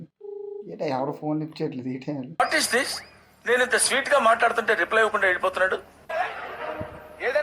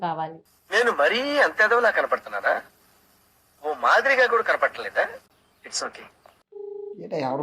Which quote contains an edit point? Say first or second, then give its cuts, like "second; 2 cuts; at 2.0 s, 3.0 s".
second; 1 cut; at 6.4 s